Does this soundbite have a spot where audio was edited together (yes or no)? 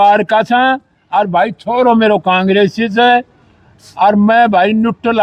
no